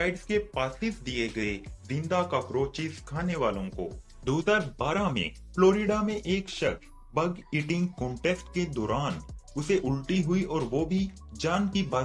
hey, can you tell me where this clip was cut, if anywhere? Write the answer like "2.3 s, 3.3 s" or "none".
4.1 s